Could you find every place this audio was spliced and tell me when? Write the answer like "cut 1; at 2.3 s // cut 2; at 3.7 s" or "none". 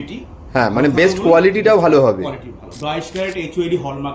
cut 1; at 2.7 s